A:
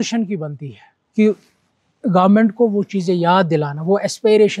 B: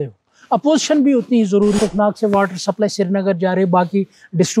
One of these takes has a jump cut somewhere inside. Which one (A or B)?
B